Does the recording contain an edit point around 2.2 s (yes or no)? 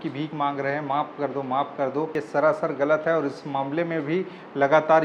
yes